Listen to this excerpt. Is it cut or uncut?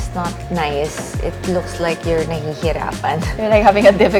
uncut